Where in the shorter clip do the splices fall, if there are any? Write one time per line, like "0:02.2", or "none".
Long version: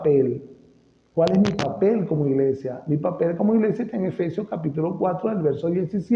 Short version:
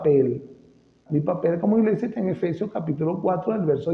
0:01.0